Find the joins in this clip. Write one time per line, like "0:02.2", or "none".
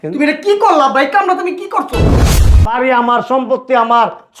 0:02.3